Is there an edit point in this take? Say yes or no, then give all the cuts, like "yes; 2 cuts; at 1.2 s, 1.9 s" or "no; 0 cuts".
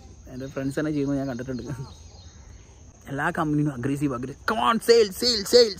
yes; 1 cut; at 2.9 s